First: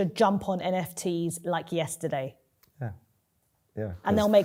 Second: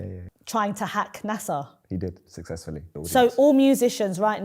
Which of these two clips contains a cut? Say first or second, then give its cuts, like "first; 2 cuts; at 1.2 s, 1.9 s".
second; 1 cut; at 2.9 s